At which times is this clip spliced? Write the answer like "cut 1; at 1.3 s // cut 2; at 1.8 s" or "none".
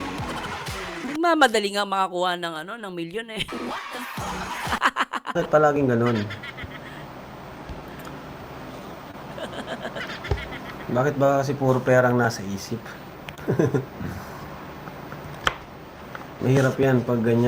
cut 1; at 1.0 s // cut 2; at 3.8 s